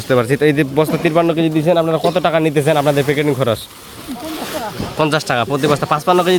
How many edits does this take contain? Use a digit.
0